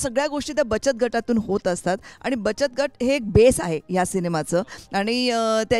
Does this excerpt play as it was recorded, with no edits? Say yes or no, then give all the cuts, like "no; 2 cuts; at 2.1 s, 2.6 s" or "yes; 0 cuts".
yes; 0 cuts